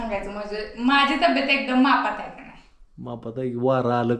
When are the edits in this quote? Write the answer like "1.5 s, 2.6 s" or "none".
none